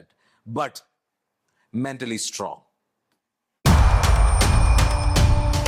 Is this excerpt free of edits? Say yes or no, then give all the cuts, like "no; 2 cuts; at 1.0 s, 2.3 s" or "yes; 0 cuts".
yes; 0 cuts